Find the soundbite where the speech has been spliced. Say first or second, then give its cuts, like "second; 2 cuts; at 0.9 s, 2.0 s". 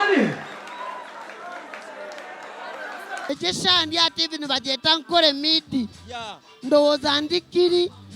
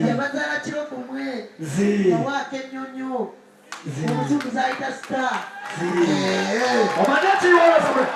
first; 1 cut; at 3.3 s